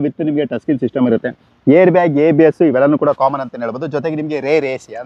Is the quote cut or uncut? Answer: uncut